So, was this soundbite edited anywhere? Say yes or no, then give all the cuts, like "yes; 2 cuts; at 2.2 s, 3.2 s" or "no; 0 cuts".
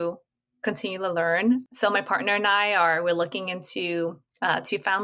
yes; 1 cut; at 1.6 s